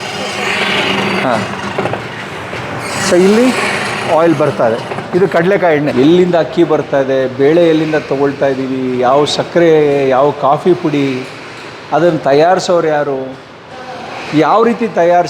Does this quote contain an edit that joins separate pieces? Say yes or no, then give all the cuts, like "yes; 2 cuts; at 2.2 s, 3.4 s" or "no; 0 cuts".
yes; 1 cut; at 5.9 s